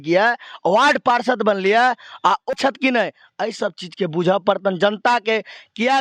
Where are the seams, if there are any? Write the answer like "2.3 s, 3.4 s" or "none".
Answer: 2.5 s